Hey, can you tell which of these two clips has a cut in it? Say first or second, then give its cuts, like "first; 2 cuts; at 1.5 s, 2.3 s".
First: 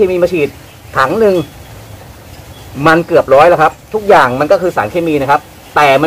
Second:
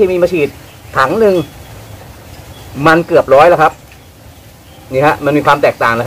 first; 1 cut; at 3.9 s